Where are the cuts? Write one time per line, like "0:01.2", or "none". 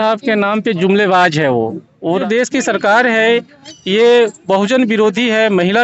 0:02.2